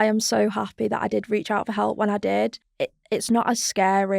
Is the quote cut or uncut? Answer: cut